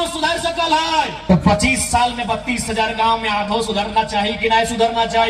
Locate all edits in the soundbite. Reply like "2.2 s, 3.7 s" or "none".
1.2 s